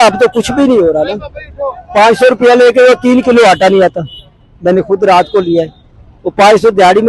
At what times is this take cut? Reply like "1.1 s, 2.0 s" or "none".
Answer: none